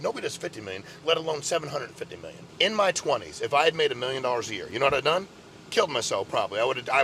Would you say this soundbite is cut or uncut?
cut